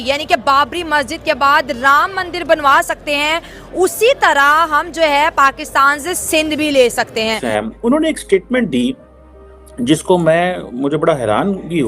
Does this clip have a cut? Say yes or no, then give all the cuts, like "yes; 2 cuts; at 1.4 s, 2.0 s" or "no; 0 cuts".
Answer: yes; 1 cut; at 7.4 s